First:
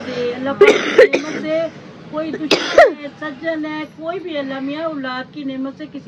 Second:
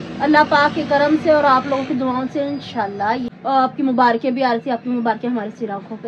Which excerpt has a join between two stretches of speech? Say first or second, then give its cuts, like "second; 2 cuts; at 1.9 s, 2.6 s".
second; 1 cut; at 3.2 s